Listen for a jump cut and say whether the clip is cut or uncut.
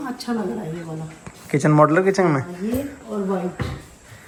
uncut